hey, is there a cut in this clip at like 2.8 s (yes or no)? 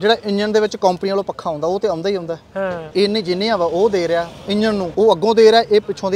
yes